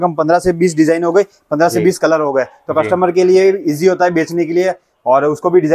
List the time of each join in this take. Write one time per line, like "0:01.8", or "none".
none